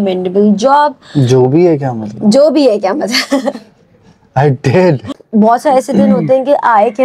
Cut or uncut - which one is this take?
cut